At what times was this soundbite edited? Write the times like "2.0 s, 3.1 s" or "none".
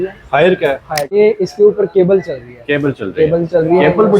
1.1 s